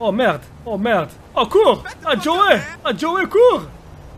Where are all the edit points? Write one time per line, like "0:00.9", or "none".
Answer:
0:01.2
0:02.7